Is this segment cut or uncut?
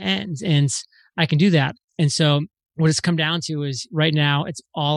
uncut